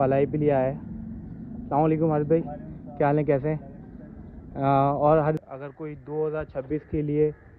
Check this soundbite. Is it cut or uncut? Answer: cut